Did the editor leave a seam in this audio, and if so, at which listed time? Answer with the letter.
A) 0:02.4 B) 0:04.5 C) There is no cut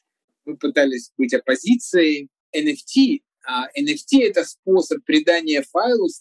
A